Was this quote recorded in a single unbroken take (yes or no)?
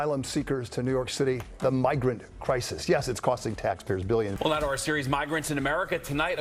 yes